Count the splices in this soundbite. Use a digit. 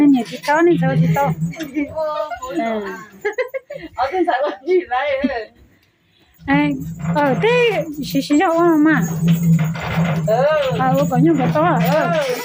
0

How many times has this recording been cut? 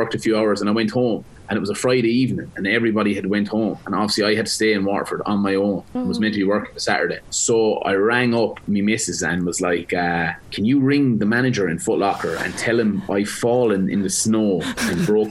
4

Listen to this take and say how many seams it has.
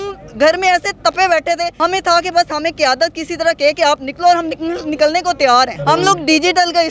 2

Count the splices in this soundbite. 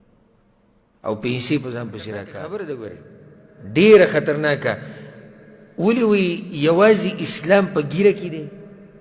1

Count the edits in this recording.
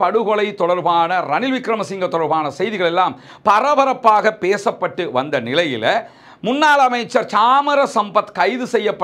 0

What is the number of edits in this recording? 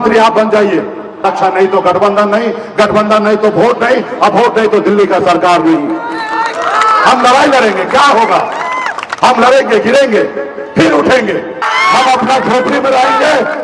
2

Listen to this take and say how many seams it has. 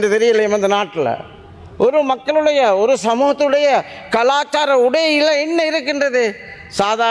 0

